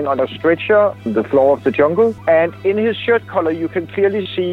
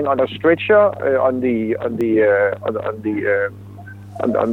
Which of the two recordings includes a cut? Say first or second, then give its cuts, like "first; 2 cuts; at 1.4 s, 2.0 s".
first; 2 cuts; at 1.0 s, 2.2 s